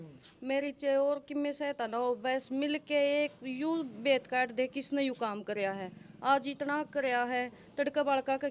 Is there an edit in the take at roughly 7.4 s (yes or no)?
no